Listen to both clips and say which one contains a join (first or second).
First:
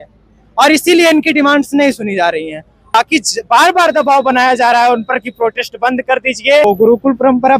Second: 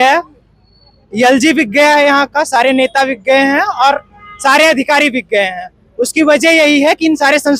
first